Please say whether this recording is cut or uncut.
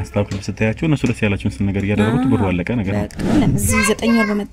cut